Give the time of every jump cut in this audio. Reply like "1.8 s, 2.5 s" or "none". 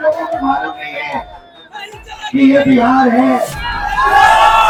none